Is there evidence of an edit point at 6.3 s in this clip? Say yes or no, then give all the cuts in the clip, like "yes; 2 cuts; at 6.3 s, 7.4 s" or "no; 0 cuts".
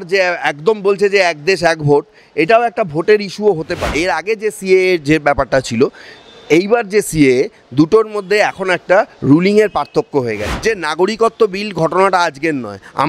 no; 2 cuts; at 3.8 s, 10.4 s